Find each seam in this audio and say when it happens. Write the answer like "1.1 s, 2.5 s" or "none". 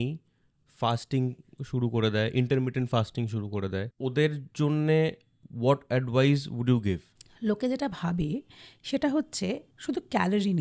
3.9 s, 9.7 s